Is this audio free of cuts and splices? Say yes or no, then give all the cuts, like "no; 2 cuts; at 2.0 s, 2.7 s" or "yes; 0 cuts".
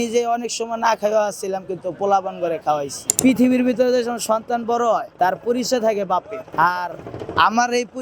no; 3 cuts; at 3.0 s, 5.1 s, 6.4 s